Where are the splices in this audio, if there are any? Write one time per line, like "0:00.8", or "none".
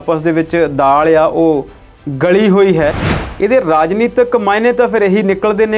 0:03.0